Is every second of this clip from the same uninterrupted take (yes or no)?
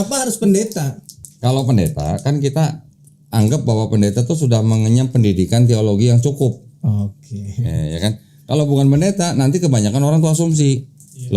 no